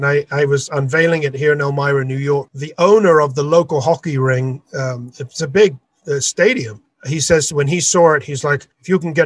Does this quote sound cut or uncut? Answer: uncut